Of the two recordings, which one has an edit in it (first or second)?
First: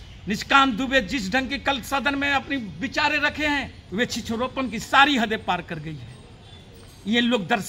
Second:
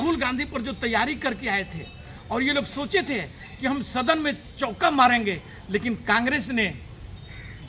first